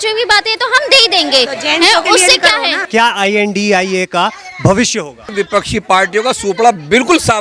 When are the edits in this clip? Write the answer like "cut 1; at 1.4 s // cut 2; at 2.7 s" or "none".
cut 1; at 2.9 s // cut 2; at 5.3 s